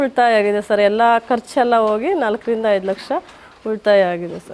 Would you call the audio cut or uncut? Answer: uncut